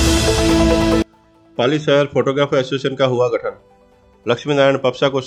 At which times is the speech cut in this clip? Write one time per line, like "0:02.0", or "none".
none